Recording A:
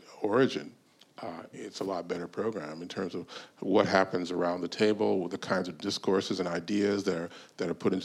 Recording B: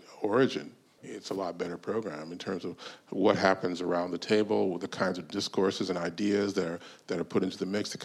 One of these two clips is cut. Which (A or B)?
B